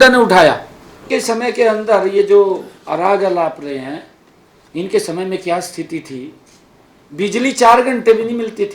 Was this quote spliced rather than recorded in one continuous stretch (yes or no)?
yes